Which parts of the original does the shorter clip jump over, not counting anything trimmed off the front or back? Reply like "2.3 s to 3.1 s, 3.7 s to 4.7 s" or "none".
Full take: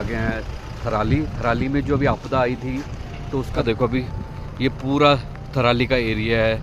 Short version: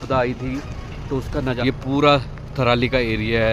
3.6 s to 4.3 s